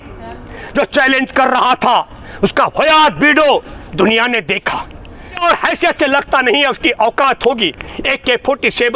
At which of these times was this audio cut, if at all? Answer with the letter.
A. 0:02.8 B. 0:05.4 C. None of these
B